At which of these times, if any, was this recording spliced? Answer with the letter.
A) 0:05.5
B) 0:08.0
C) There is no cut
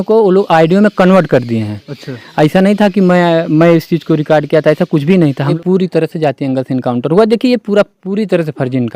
A